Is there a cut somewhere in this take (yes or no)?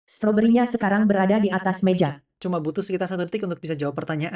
yes